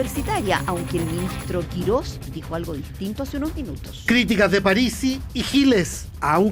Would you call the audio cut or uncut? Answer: uncut